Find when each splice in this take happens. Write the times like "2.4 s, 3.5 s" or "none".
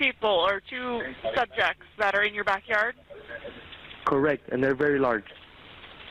none

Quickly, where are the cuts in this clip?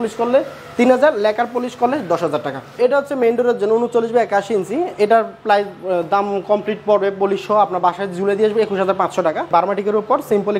2.8 s, 9.5 s

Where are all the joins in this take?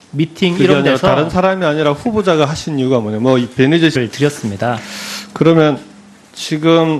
none

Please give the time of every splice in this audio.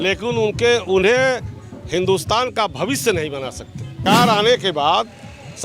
4.0 s

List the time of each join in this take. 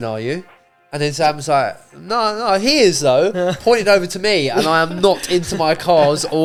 none

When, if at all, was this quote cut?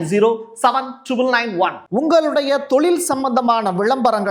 1.8 s

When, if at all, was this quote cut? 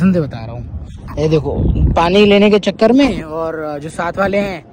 none

